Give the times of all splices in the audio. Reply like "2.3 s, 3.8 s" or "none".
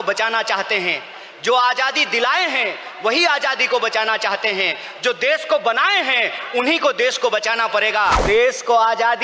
8.2 s